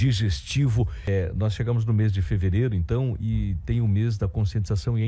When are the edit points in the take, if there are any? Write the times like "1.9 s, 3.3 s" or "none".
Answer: 1.1 s